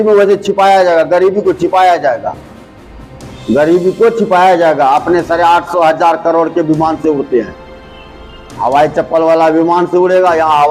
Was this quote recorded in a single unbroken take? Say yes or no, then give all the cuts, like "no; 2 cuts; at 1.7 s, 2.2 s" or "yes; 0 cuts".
yes; 0 cuts